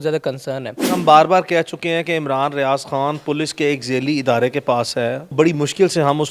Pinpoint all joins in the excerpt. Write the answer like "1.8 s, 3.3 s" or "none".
1.0 s, 5.3 s

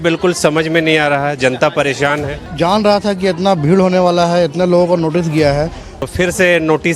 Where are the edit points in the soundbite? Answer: 2.4 s, 5.9 s

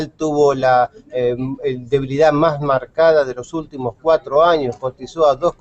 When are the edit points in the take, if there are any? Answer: 3.8 s

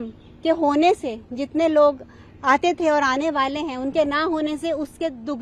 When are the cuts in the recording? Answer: none

